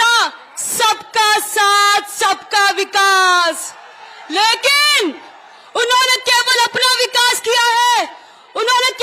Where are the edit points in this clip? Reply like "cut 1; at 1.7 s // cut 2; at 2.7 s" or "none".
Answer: none